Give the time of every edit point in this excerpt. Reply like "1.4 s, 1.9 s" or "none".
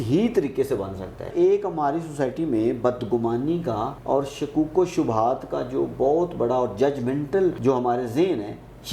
1.3 s, 4.0 s, 7.6 s